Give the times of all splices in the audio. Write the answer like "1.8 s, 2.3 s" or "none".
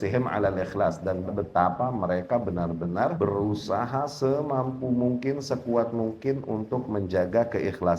1.3 s, 3.2 s